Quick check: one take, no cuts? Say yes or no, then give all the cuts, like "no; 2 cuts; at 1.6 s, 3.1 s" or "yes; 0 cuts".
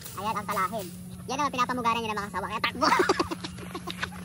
yes; 0 cuts